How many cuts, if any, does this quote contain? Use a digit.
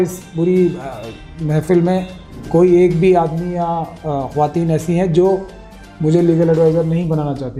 0